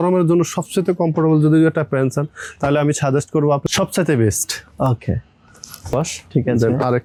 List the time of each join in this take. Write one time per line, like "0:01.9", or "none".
none